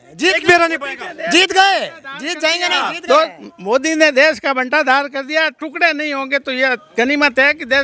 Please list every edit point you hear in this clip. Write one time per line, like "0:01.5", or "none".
none

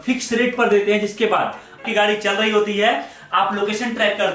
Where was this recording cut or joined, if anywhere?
0:01.8

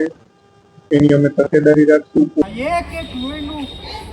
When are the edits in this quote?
0:02.4

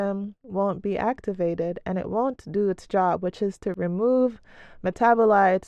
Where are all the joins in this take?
none

